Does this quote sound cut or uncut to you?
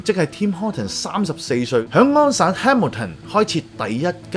uncut